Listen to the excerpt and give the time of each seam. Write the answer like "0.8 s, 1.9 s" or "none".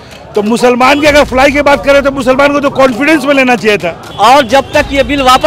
4.0 s